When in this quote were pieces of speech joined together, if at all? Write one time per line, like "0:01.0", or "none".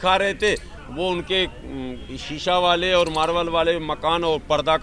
none